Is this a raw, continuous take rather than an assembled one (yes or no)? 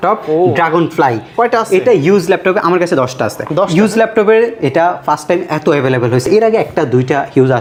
yes